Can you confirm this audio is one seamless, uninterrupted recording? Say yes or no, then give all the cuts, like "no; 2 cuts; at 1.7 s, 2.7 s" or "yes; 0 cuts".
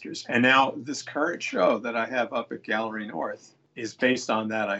yes; 0 cuts